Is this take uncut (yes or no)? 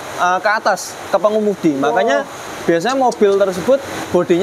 yes